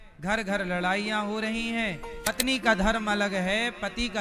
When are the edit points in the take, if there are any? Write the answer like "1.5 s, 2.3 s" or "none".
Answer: 2.2 s